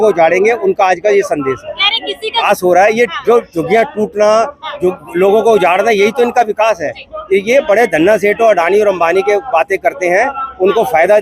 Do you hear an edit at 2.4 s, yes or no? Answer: yes